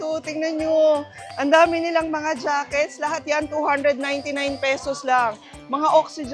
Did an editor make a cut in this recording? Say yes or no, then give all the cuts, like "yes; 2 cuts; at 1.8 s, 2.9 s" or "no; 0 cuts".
no; 0 cuts